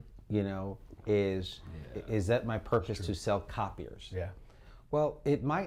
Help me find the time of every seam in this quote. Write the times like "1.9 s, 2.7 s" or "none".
none